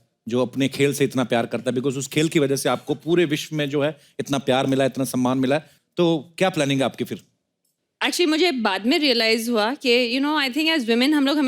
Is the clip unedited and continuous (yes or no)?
no